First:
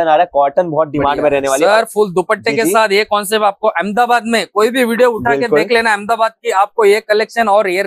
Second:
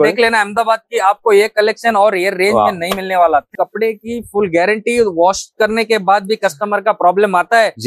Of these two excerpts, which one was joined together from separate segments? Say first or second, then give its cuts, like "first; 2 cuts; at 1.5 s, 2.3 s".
second; 1 cut; at 3.5 s